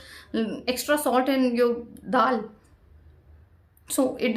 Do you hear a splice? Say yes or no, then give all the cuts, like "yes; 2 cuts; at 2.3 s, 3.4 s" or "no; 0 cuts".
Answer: no; 0 cuts